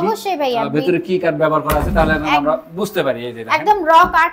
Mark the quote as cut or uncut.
uncut